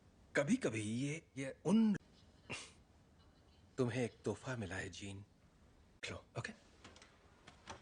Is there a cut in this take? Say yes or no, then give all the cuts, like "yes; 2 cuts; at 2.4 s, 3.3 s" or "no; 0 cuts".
no; 0 cuts